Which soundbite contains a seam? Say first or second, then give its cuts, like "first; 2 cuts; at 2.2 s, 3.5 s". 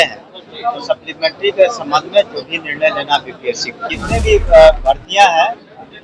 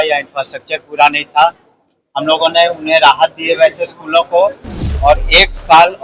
first; 1 cut; at 3.9 s